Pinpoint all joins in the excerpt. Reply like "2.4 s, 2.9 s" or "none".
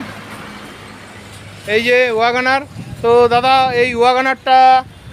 none